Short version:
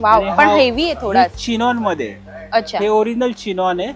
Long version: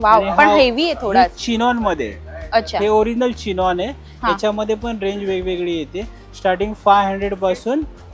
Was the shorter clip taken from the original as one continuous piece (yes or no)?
yes